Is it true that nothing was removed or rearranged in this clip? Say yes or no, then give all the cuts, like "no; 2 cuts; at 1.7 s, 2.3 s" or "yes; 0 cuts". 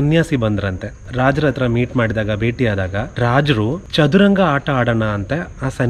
no; 3 cuts; at 1.0 s, 3.1 s, 3.8 s